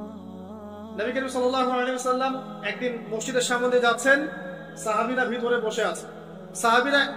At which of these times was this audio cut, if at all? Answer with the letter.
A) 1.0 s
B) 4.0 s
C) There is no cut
A